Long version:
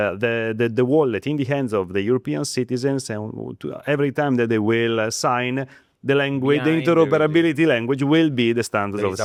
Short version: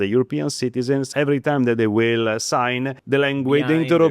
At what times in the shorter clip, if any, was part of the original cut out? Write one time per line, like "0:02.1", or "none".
0:01.1
0:03.0